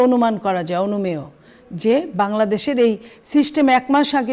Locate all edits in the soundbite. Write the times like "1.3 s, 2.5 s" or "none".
none